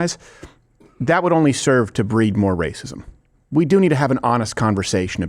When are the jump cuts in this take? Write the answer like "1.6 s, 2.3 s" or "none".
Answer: none